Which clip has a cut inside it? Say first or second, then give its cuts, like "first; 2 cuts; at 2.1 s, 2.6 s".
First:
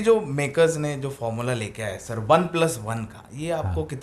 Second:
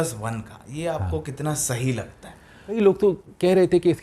second; 1 cut; at 2.8 s